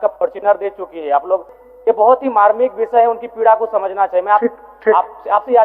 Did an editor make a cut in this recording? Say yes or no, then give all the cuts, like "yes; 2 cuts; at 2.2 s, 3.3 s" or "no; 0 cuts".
yes; 1 cut; at 1.5 s